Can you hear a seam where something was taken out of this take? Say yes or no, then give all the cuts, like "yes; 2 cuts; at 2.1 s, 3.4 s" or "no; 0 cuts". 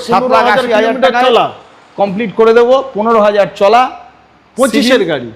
no; 0 cuts